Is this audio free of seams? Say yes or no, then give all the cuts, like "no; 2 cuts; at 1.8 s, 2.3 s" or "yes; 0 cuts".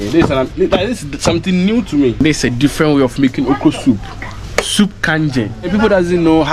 no; 2 cuts; at 2.2 s, 5.7 s